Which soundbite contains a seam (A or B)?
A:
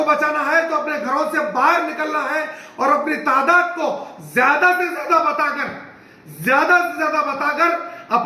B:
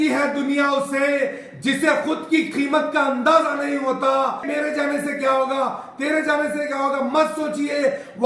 B